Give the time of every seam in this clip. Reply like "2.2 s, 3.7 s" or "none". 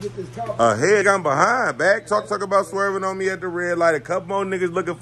1.0 s